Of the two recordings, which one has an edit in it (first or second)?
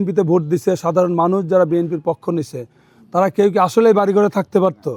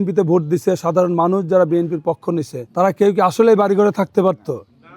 second